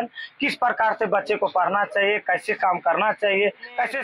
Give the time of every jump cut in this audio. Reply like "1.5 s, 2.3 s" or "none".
none

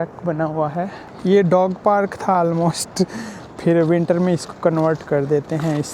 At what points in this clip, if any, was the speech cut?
1.0 s

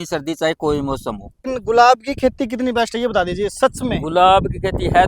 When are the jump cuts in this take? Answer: 1.4 s

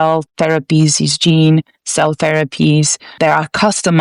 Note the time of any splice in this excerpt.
none

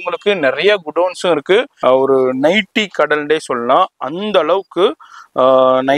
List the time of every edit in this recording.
1.7 s

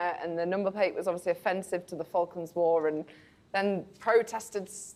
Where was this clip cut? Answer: none

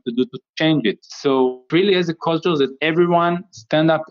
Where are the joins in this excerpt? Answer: 2.8 s

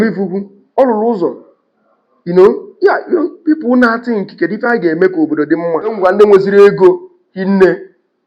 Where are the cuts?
6.0 s

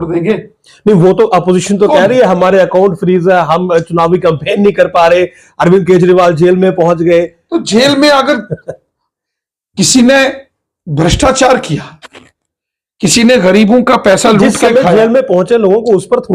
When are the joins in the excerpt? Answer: none

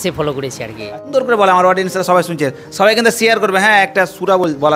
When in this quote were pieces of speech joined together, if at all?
1.0 s

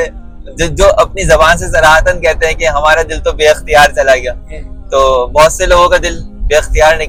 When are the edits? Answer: none

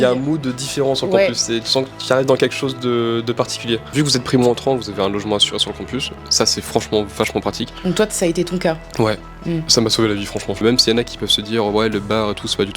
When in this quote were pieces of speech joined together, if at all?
3.9 s, 10.6 s

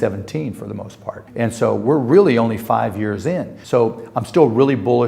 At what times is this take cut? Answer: 1.2 s, 3.5 s

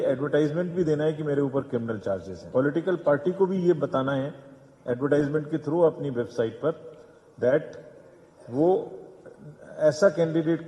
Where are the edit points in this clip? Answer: 2.4 s

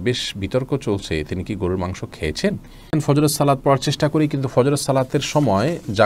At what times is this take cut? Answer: 2.9 s

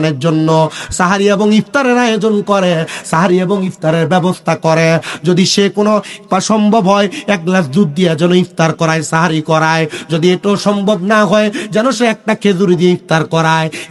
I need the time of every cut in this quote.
none

